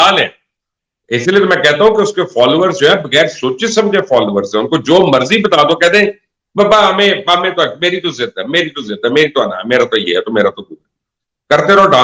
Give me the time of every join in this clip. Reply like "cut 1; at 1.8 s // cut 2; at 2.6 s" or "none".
none